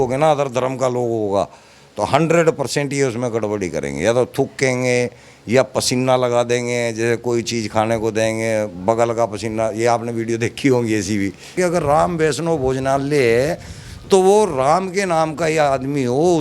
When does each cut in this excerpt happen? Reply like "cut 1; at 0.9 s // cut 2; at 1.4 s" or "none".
cut 1; at 11.5 s

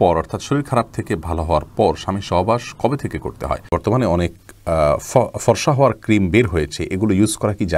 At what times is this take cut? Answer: cut 1; at 3.7 s

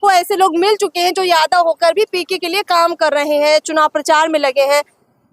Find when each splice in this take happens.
none

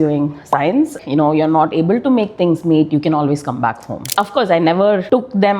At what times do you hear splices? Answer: cut 1; at 1.0 s

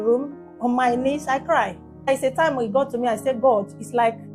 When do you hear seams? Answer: cut 1; at 2.1 s

